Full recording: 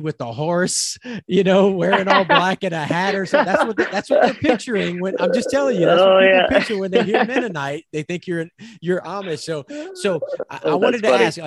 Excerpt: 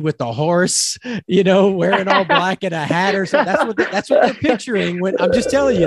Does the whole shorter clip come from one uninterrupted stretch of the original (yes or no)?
yes